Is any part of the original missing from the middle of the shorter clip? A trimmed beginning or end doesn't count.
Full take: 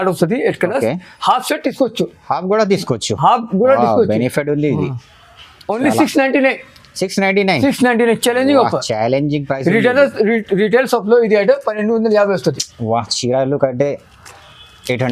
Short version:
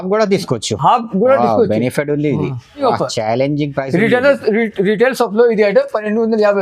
yes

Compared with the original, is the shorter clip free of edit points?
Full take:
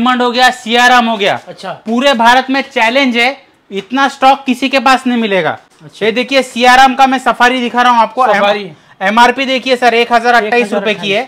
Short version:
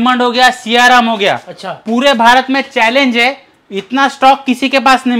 yes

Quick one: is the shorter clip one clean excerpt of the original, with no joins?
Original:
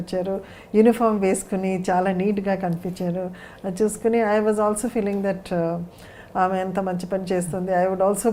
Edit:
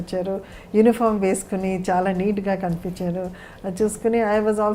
yes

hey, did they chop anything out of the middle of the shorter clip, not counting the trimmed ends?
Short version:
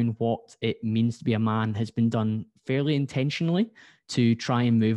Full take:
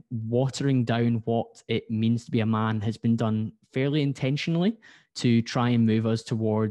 no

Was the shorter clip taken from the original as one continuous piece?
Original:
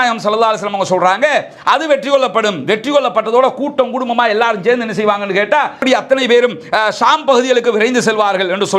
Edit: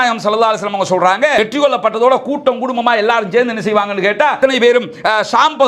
no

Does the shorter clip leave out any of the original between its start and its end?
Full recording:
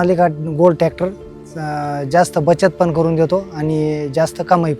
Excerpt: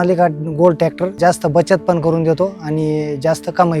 yes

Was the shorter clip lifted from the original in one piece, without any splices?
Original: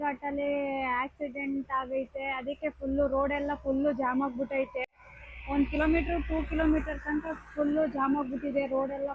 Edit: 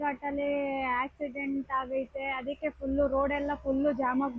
yes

